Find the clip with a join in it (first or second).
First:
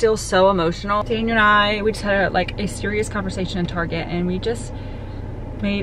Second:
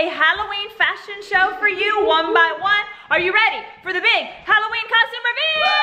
first